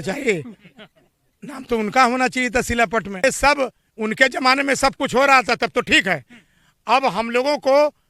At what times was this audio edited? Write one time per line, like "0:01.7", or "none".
0:03.2